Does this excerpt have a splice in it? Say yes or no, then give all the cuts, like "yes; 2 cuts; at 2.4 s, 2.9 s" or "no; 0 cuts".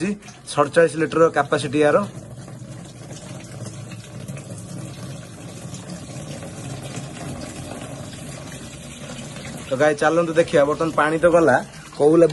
no; 0 cuts